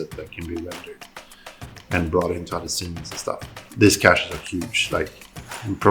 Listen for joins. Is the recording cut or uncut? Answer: cut